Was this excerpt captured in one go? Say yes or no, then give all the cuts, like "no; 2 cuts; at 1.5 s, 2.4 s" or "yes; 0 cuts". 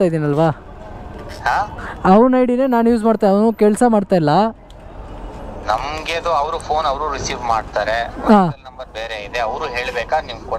yes; 0 cuts